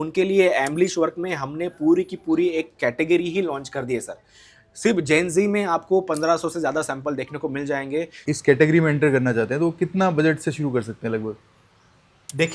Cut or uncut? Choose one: cut